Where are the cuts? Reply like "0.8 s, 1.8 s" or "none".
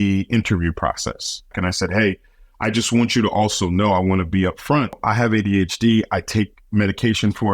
1.5 s, 5.0 s